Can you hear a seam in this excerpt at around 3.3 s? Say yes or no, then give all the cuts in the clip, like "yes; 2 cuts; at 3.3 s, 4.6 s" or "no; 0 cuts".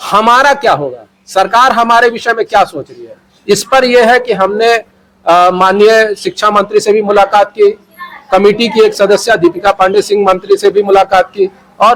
no; 0 cuts